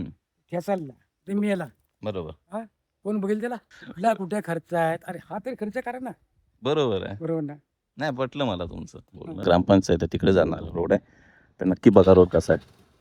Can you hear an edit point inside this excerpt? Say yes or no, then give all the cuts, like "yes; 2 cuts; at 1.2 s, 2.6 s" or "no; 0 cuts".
yes; 2 cuts; at 3.8 s, 9.4 s